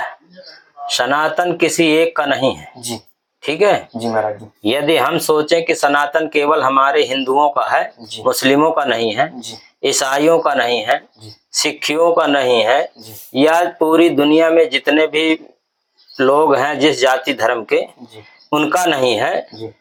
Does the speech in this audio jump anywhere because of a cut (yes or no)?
no